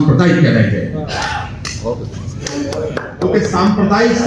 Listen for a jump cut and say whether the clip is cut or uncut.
uncut